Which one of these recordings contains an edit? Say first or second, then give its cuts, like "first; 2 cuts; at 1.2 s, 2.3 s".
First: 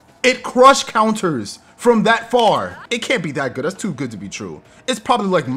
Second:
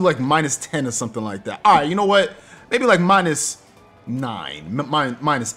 first; 1 cut; at 2.8 s